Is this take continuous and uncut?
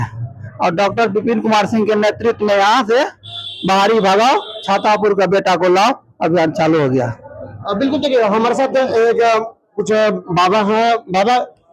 yes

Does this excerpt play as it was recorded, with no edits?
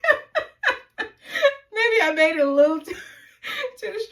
yes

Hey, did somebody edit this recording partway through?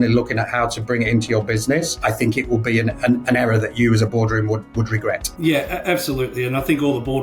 no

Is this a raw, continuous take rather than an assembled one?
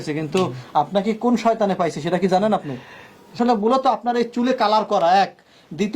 no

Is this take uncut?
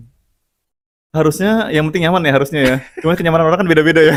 yes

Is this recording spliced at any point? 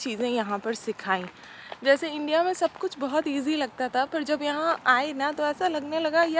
no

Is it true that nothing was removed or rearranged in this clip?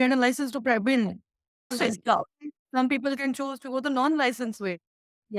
no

